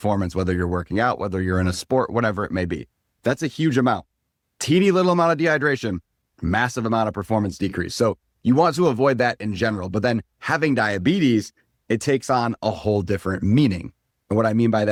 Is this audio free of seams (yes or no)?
yes